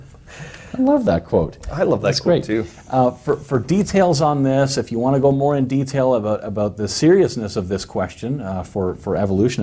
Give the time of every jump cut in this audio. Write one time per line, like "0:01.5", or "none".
none